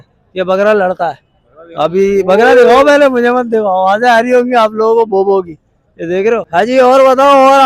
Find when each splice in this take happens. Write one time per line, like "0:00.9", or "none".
0:06.5

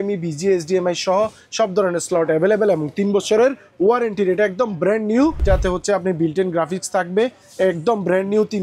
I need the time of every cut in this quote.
0:05.4

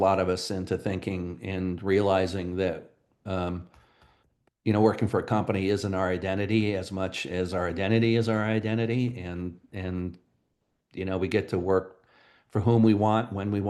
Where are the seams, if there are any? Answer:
none

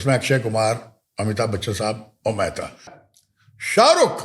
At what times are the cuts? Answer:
0:02.9

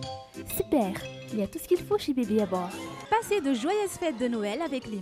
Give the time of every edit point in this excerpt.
none

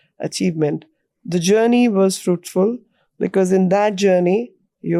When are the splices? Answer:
none

